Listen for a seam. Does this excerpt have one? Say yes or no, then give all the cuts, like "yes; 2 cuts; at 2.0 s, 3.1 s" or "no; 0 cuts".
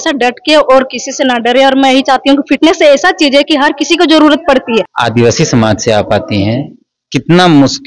yes; 1 cut; at 4.9 s